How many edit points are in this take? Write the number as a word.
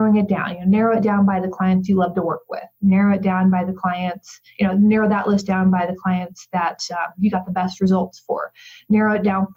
zero